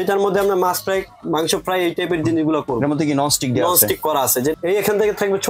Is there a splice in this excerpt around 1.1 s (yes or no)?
no